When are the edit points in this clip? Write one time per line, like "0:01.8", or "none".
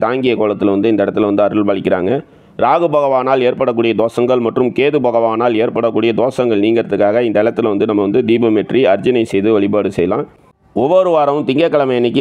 0:10.9